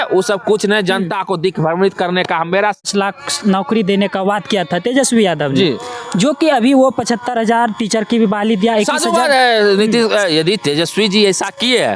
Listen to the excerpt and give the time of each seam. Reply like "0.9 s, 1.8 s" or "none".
2.8 s